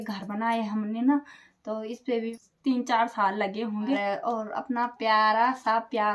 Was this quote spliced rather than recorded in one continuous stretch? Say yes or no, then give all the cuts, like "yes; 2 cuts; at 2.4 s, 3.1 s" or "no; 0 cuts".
yes; 2 cuts; at 2.3 s, 4.0 s